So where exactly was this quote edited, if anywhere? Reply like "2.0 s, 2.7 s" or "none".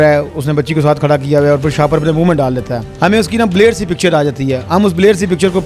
2.8 s